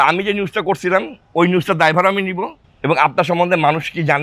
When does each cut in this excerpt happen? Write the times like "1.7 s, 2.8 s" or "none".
2.6 s